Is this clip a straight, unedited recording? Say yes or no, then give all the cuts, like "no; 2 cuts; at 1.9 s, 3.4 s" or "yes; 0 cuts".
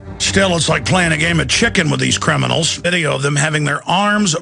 yes; 0 cuts